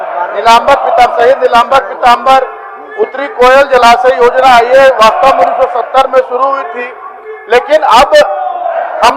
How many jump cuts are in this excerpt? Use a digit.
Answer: 0